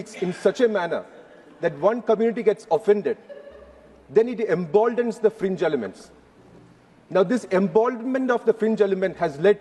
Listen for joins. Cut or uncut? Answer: uncut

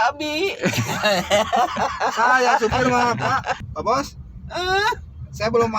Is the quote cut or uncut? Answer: cut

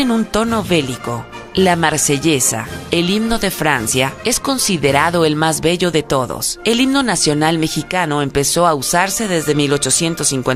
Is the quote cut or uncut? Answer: uncut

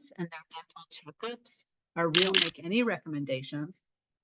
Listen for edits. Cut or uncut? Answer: cut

